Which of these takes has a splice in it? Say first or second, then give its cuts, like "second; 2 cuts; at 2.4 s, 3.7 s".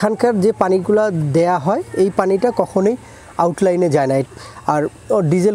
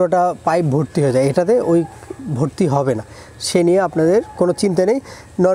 first; 1 cut; at 4.2 s